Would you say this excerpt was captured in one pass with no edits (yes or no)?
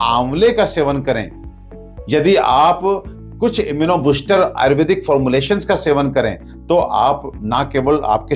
yes